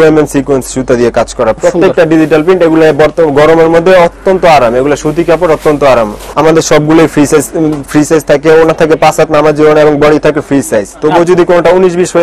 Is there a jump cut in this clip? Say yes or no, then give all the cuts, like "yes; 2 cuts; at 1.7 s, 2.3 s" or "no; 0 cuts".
yes; 2 cuts; at 1.6 s, 6.2 s